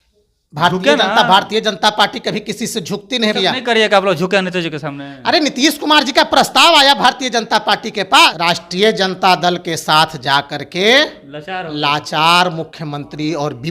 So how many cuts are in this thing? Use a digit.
2